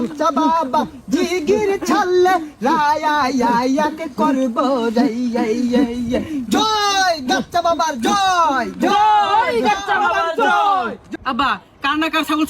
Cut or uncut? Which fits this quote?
cut